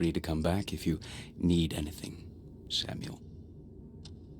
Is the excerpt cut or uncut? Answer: cut